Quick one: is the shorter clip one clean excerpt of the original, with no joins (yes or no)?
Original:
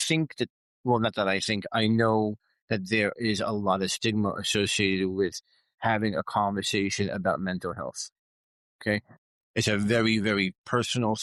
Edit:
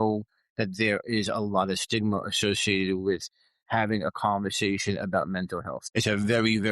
no